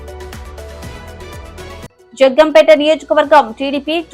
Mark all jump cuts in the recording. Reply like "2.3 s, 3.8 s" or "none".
2.0 s